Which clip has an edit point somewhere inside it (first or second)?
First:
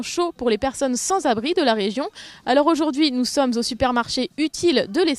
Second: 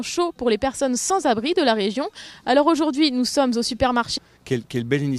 first